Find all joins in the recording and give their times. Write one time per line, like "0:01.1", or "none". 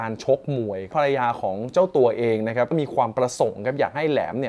0:00.9
0:02.7